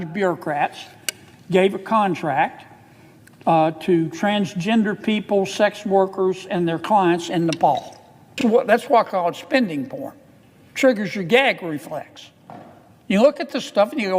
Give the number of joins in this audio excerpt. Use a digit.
1